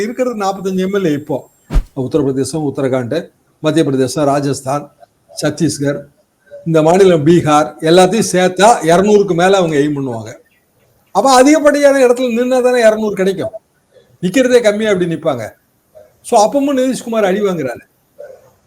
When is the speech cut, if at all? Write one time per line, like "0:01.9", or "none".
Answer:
0:01.7